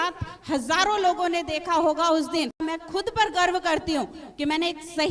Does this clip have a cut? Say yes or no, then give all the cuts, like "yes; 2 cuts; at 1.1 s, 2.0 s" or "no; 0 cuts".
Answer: yes; 1 cut; at 2.6 s